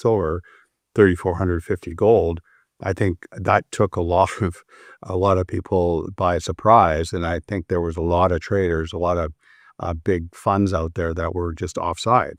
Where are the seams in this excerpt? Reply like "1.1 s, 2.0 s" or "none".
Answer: none